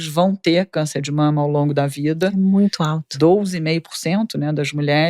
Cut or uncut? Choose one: uncut